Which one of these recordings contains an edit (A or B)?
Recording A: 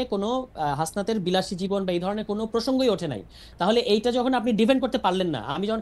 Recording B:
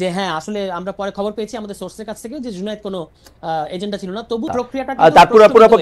B